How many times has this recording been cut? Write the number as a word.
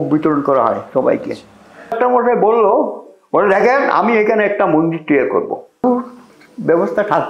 two